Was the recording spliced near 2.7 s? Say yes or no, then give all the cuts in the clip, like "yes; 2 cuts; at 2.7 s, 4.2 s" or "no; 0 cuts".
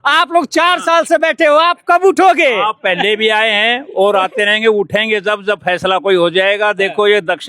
no; 0 cuts